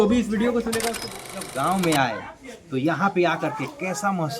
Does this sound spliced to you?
yes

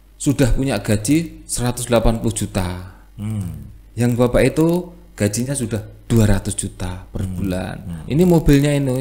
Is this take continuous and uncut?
yes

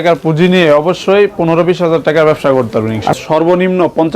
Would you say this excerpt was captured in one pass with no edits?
no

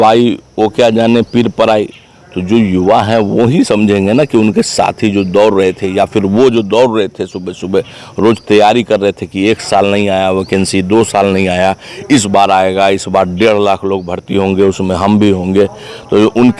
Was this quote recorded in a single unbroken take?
yes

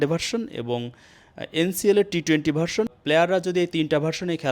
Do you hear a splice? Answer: yes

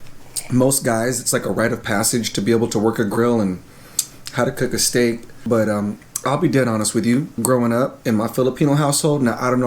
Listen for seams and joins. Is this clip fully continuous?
no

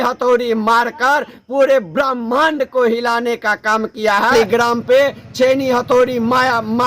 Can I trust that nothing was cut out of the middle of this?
no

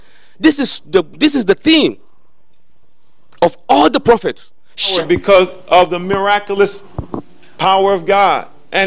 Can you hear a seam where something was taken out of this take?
yes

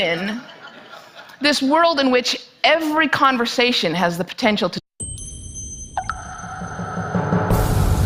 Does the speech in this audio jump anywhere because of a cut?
no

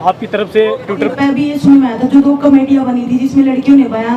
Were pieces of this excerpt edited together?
yes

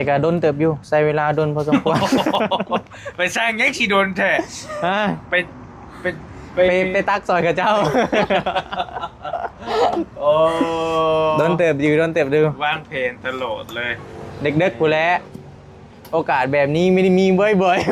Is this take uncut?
yes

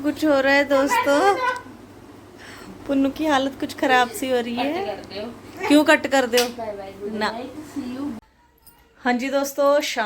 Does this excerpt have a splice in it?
yes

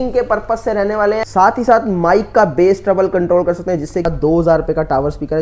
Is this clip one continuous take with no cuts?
no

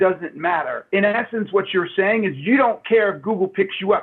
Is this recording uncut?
yes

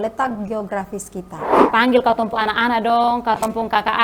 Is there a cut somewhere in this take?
yes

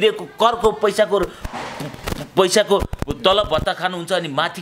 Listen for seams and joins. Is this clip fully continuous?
yes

